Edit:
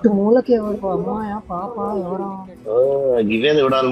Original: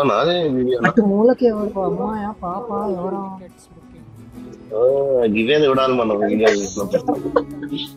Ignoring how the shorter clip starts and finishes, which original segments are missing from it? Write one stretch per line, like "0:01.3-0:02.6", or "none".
0:03.4-0:04.6